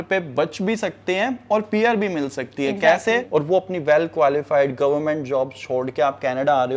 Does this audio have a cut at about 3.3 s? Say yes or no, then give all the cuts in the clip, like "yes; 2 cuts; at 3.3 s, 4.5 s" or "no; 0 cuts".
yes; 1 cut; at 3.3 s